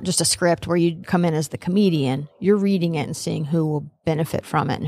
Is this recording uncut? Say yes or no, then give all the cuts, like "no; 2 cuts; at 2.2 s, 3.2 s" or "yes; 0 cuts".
no; 1 cut; at 1.1 s